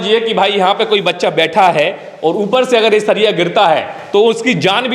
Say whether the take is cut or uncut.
uncut